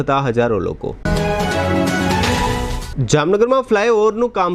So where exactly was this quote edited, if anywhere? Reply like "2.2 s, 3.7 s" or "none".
none